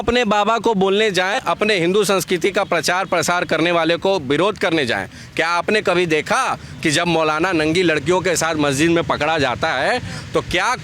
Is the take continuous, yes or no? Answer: no